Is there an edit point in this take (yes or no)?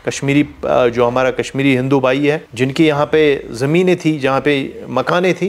no